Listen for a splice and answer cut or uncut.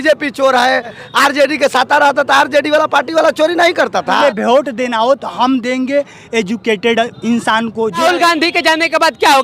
cut